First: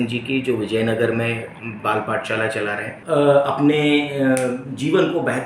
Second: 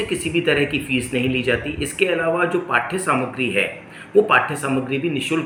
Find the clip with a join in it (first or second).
first